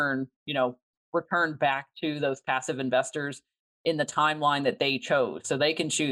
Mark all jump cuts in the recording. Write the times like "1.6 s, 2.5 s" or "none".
0.9 s